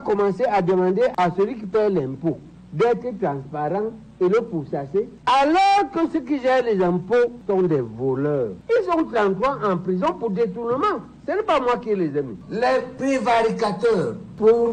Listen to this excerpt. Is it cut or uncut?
cut